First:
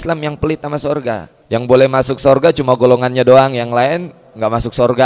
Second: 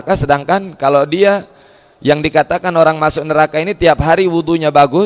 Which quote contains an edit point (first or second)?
first